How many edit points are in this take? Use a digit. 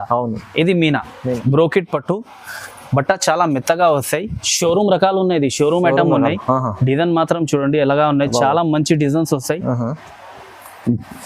1